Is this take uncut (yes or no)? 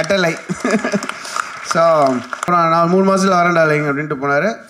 no